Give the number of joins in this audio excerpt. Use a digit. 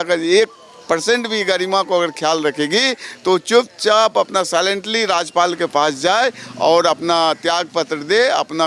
0